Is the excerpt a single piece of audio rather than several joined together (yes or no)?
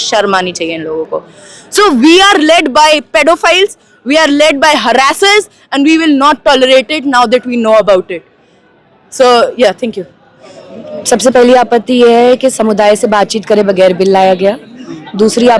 yes